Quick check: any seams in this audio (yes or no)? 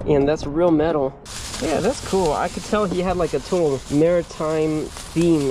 yes